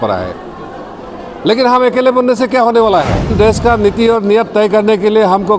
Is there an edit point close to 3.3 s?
yes; 1 cut; at 3.3 s

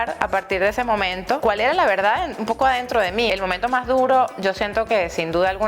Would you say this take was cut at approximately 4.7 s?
no; 2 cuts; at 1.4 s, 3.3 s

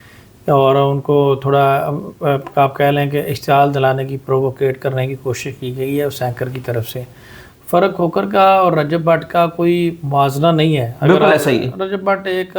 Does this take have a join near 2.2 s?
no; 1 cut; at 7.4 s

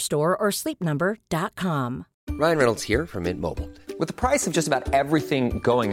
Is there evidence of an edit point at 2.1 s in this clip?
yes; 1 cut; at 2.1 s

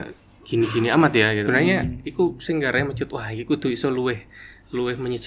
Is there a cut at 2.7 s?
no; 1 cut; at 1.4 s

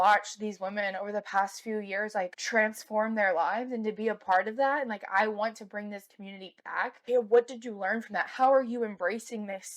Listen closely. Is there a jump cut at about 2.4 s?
yes; 2 cuts; at 2.4 s, 7.0 s

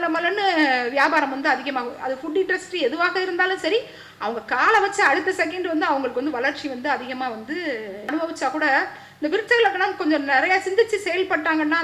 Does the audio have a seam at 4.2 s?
no; 1 cut; at 8.1 s

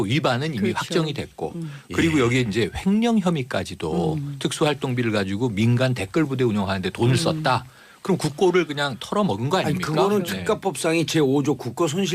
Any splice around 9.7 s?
yes; 1 cut; at 9.7 s

